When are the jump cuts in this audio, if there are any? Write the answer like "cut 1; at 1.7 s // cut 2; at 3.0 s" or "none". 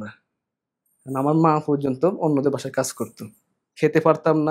cut 1; at 3.6 s